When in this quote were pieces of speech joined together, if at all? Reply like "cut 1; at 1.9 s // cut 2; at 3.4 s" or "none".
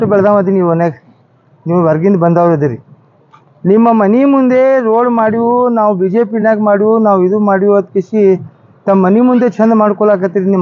none